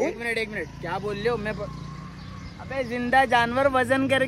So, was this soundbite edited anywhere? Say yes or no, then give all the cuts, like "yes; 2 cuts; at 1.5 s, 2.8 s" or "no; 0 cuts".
no; 0 cuts